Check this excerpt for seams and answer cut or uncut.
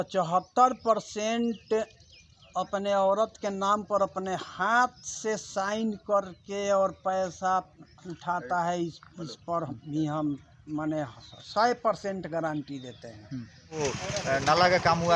cut